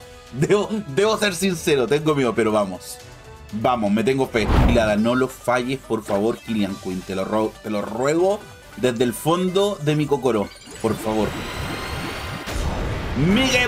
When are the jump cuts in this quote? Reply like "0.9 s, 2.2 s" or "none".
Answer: 4.6 s